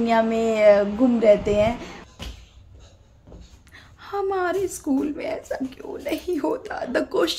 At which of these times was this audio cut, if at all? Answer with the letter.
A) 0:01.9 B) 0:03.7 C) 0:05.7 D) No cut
A